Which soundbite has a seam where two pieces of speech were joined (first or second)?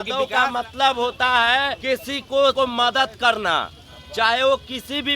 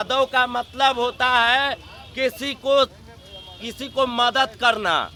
first